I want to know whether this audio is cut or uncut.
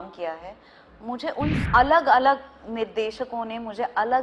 cut